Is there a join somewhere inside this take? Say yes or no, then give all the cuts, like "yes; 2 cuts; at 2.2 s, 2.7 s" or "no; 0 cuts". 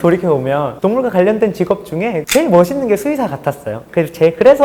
no; 0 cuts